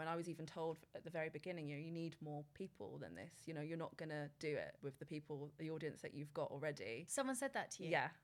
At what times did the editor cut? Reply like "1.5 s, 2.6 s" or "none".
none

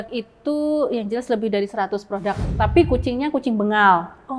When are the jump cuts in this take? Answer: 2.5 s

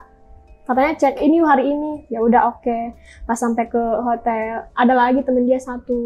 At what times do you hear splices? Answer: none

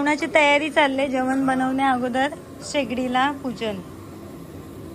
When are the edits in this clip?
none

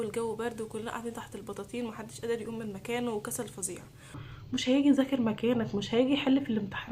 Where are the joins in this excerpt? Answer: 4.2 s

